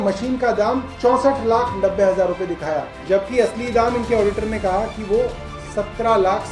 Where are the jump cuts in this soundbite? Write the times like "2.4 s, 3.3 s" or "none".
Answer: none